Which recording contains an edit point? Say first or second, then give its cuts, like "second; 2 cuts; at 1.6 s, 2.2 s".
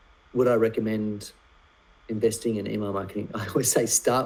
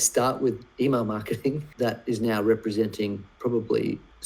second; 1 cut; at 1.7 s